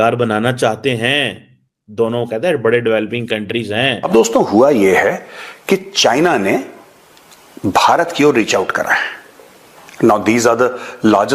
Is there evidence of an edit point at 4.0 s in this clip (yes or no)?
yes